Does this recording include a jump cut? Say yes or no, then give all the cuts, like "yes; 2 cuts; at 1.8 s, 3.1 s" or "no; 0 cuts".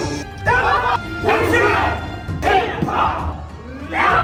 no; 0 cuts